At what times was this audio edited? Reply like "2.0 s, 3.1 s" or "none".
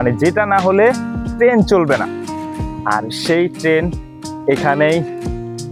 none